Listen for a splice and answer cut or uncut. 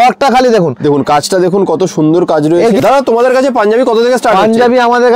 cut